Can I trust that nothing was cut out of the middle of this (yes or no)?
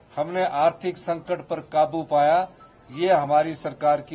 yes